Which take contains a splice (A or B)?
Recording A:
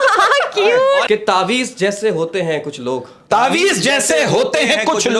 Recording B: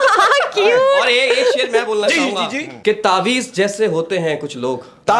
A